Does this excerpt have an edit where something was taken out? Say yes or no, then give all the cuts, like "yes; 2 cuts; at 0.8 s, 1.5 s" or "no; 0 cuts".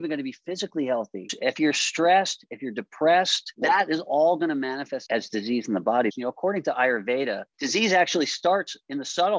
yes; 5 cuts; at 1.3 s, 3.4 s, 5.0 s, 6.1 s, 7.5 s